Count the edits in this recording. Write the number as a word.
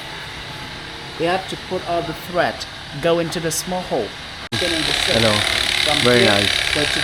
one